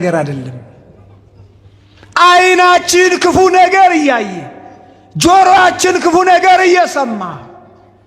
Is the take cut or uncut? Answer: uncut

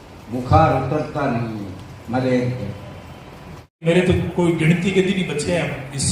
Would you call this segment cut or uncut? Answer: cut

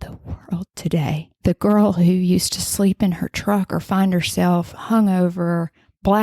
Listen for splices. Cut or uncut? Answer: cut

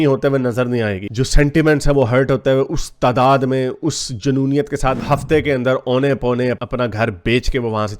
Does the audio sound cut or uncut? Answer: cut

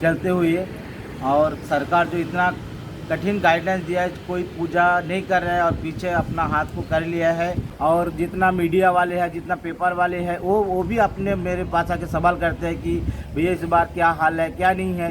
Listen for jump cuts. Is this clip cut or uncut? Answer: cut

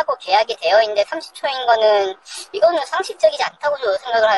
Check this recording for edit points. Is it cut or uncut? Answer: uncut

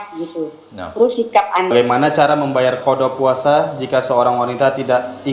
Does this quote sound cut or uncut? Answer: cut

